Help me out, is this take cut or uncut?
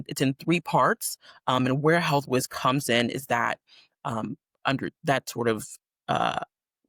uncut